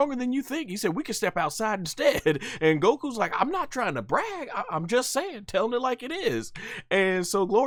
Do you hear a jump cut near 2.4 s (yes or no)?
no